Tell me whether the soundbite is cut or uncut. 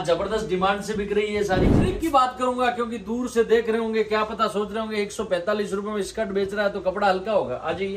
cut